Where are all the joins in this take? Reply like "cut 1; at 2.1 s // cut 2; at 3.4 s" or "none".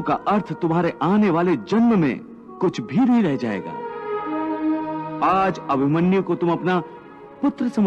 none